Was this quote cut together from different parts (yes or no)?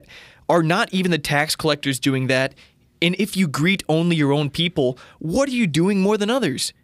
no